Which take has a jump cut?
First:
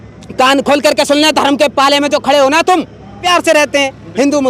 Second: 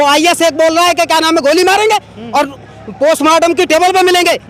first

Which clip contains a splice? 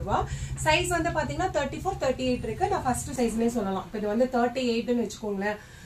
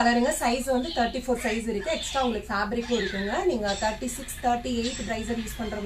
first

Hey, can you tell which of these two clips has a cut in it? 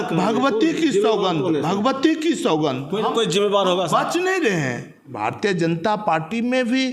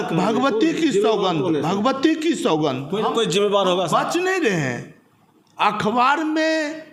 first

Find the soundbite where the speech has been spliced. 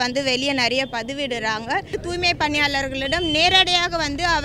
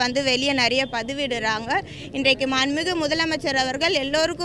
first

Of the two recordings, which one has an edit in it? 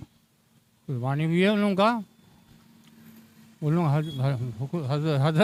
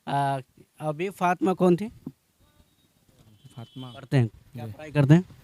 second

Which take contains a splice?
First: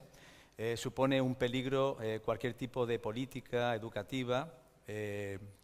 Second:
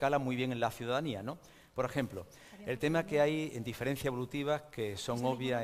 first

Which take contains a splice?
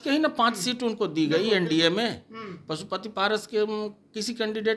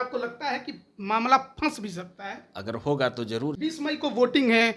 second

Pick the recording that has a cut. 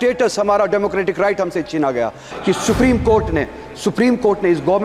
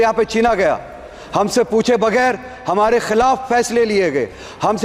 first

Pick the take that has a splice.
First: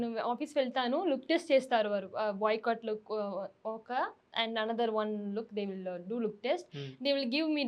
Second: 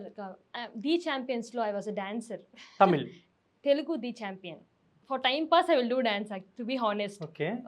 second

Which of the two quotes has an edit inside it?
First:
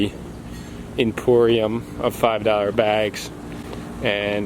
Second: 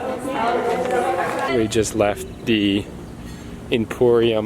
second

